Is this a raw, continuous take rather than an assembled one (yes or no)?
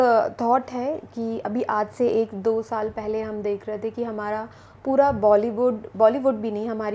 yes